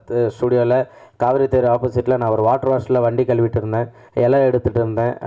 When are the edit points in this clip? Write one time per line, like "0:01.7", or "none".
0:04.0